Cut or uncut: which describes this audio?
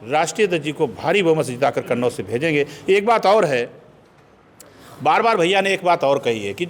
uncut